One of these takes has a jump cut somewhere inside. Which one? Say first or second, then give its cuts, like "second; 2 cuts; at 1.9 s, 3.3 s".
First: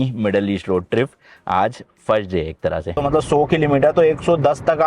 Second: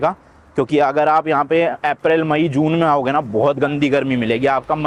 first; 1 cut; at 3.0 s